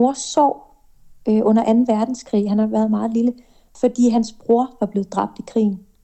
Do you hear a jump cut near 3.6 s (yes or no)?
yes